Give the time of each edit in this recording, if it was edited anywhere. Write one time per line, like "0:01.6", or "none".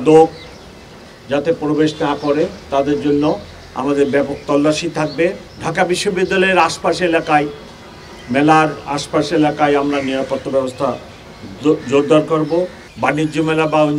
0:05.5
0:12.8